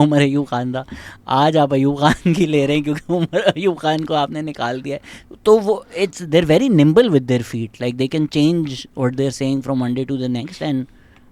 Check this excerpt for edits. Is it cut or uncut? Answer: uncut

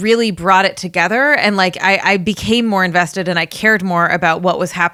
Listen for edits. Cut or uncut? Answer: uncut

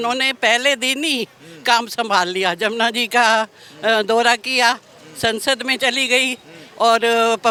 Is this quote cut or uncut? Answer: uncut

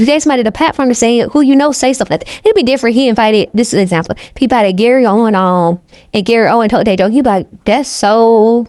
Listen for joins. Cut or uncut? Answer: uncut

